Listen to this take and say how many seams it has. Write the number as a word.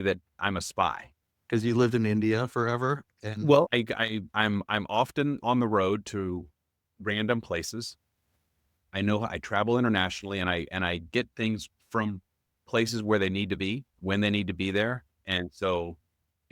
three